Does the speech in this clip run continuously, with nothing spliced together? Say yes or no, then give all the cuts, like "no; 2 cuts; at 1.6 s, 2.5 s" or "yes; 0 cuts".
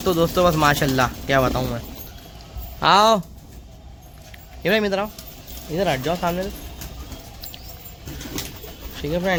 yes; 0 cuts